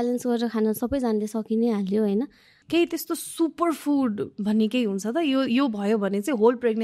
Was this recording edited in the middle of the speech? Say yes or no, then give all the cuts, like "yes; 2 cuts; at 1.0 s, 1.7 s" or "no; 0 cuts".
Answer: yes; 1 cut; at 2.5 s